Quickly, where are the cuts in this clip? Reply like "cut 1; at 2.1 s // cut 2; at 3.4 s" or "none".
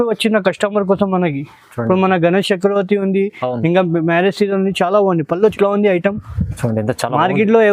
cut 1; at 5.5 s